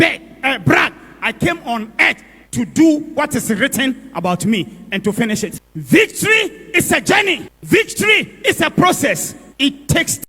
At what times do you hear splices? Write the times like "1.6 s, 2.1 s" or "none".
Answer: 5.5 s